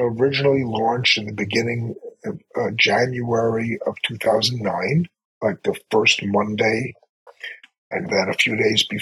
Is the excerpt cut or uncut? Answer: uncut